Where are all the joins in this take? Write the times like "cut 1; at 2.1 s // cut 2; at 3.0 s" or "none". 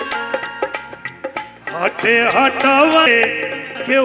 cut 1; at 3.1 s